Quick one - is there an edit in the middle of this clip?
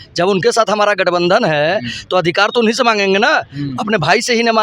no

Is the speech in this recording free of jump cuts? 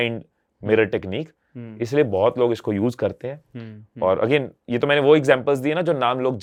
yes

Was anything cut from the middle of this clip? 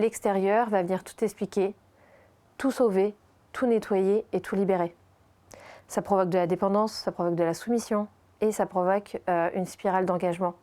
no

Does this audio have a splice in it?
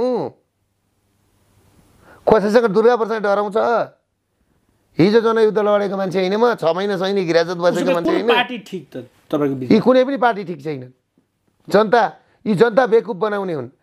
no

